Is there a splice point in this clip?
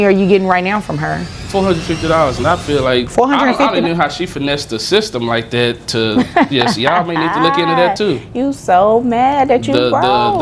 yes; 2 cuts; at 1.3 s, 3.1 s

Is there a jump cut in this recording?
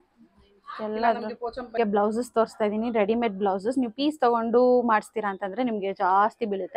yes; 1 cut; at 1.6 s

